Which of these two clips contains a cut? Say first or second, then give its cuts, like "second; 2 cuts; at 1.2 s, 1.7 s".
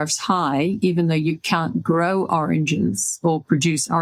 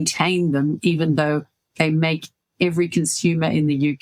second; 1 cut; at 1.8 s